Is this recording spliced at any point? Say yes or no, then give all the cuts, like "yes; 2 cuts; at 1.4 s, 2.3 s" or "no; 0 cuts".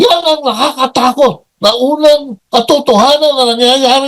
yes; 1 cut; at 2.3 s